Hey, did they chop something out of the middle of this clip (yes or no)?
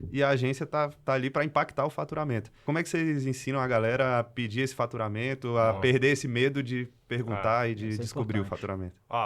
yes